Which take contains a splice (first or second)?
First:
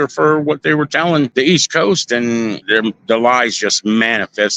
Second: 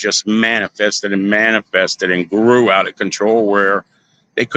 first